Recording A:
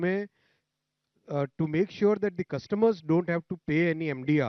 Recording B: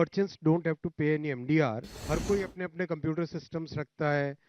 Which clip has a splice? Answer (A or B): B